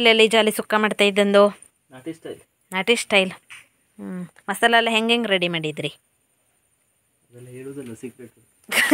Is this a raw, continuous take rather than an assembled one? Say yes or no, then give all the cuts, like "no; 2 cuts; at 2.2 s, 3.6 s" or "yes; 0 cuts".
yes; 0 cuts